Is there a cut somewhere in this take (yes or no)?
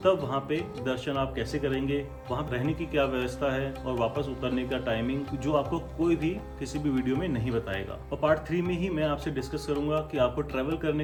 no